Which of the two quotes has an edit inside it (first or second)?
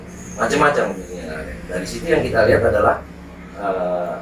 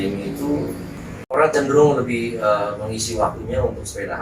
second